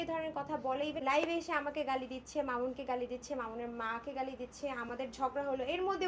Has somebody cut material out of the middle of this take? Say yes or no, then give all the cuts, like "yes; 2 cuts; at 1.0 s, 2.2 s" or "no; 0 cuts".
yes; 1 cut; at 1.0 s